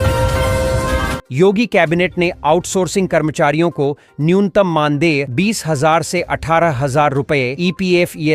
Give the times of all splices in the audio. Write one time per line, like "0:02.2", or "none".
0:01.2